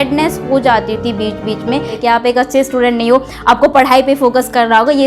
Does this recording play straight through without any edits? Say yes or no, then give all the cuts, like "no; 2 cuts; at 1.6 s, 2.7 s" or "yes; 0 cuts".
no; 1 cut; at 1.9 s